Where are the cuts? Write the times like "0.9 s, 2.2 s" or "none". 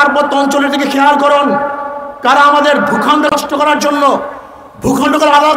3.3 s